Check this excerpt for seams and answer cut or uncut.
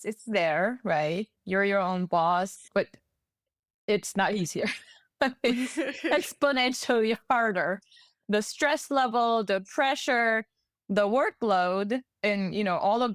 cut